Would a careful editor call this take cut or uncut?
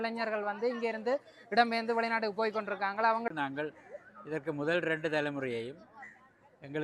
cut